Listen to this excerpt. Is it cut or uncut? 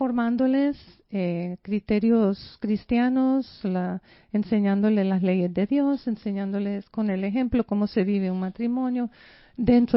uncut